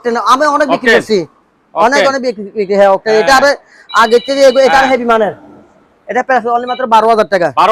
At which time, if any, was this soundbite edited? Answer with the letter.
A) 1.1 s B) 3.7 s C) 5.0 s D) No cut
D